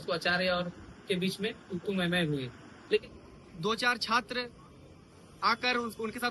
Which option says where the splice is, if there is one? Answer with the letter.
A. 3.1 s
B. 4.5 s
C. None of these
A